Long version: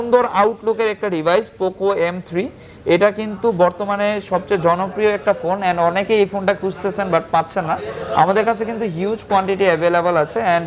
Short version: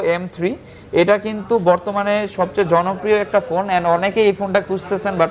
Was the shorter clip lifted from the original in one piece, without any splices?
yes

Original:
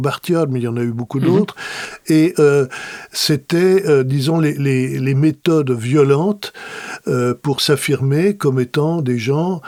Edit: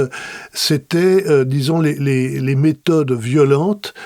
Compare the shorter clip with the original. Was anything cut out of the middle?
no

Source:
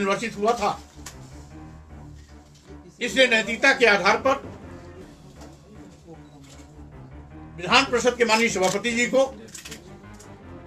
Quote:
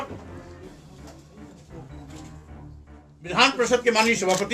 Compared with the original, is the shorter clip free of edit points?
yes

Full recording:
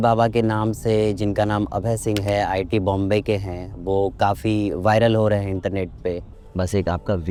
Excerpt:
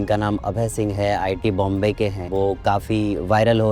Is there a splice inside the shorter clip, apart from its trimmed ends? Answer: yes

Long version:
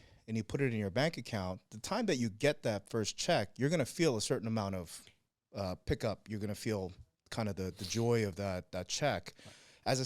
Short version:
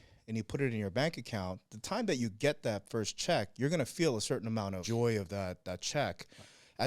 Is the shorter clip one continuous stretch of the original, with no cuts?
no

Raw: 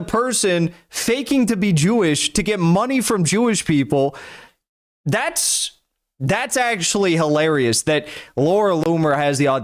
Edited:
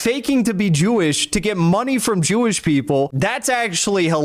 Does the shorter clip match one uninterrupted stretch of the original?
no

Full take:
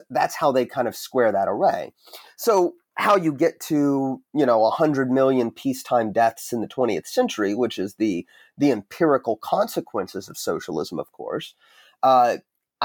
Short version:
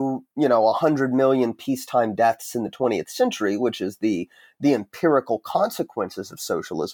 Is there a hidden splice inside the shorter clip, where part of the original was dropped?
no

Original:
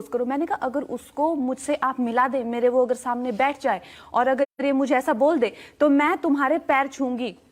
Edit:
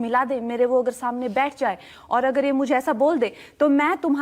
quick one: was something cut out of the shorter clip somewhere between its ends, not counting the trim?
yes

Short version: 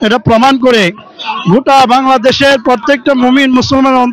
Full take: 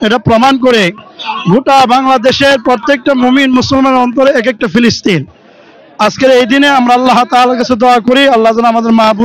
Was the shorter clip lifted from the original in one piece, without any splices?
yes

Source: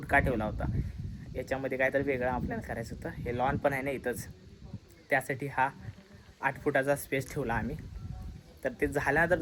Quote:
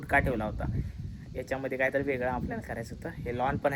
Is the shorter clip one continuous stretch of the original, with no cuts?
yes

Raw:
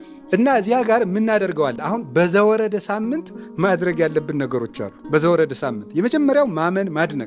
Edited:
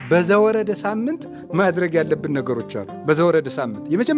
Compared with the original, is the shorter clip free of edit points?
yes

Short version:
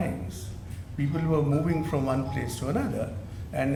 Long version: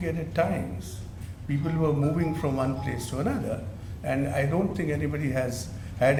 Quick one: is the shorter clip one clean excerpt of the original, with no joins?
yes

